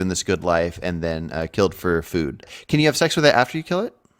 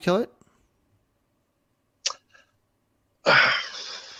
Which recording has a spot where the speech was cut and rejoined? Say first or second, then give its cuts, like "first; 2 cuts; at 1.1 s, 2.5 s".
first; 1 cut; at 2.5 s